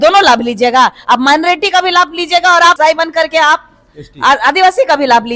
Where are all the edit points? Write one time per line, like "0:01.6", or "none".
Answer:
0:02.8